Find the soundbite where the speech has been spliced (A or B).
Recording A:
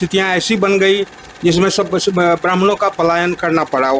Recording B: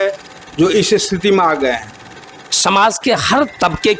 B